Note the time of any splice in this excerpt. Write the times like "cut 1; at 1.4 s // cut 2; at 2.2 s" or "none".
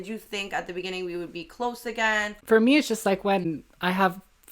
cut 1; at 2.3 s // cut 2; at 3.6 s